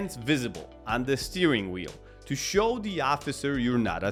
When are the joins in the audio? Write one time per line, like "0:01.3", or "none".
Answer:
none